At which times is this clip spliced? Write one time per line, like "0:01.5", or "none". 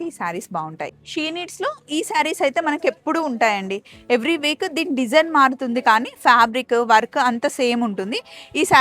0:00.9